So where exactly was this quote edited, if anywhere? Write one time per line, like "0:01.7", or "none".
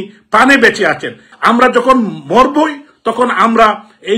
0:01.3

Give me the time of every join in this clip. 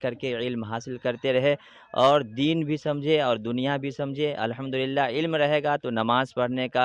none

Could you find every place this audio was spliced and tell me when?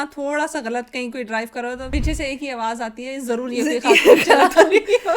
0:01.8

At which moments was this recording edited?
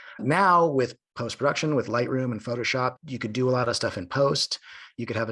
none

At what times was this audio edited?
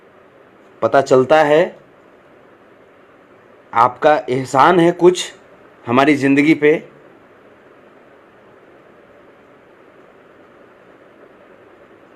none

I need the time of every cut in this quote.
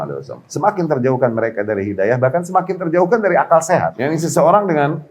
0:03.9

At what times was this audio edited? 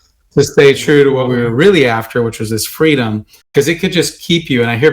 0:01.2
0:03.5

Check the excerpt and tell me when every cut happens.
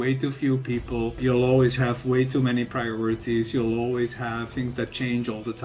0:01.2
0:04.5

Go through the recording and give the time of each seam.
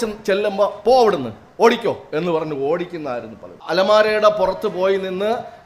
0:03.7

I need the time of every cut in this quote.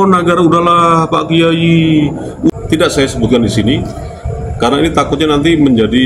0:02.5

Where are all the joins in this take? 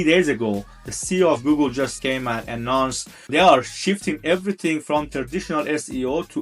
0:02.0
0:03.3
0:05.1

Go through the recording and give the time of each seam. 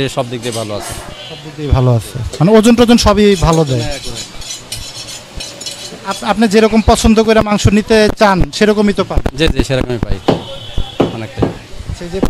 none

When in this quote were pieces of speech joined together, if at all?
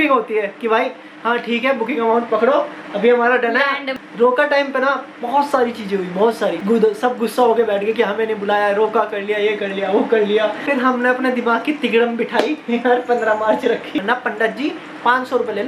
0:04.0
0:06.6
0:10.6
0:13.9

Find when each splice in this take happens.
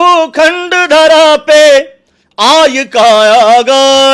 none

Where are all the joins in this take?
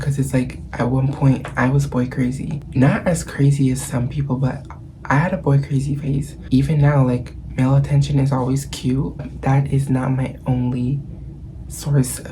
0:02.6
0:06.3
0:09.2

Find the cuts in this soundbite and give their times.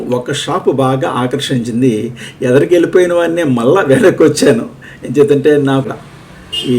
0:05.8

